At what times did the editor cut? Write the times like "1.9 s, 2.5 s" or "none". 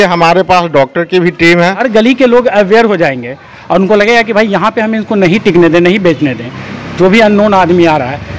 1.8 s